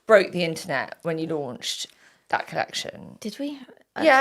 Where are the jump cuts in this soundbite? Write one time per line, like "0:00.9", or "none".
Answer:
0:03.1